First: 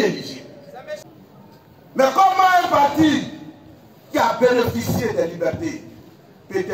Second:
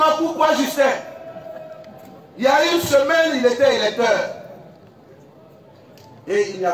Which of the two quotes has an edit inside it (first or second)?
first